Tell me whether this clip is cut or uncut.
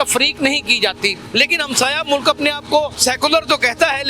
cut